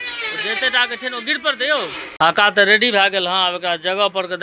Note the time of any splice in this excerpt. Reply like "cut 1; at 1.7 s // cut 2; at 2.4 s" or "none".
cut 1; at 2.1 s